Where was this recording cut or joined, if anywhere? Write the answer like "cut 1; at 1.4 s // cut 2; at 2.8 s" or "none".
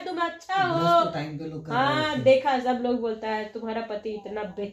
none